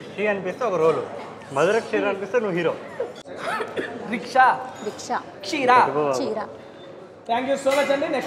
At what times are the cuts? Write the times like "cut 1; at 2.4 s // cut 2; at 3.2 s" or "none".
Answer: cut 1; at 3.3 s